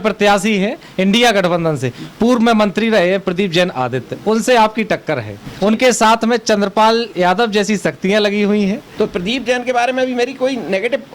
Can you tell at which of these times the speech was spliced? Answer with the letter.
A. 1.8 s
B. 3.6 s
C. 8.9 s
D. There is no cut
C